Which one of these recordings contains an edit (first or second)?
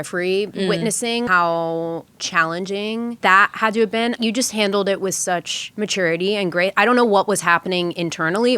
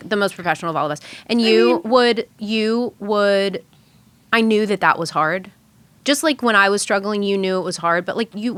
first